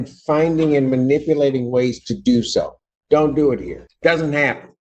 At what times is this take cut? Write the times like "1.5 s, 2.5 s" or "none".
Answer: 3.8 s